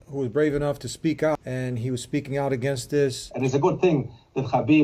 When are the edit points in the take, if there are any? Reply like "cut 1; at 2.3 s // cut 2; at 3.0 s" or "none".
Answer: cut 1; at 1.4 s // cut 2; at 3.3 s